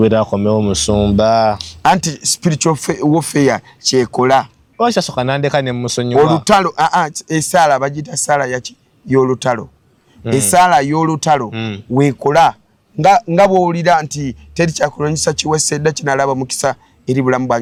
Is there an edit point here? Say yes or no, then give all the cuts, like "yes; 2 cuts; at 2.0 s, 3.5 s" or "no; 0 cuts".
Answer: no; 0 cuts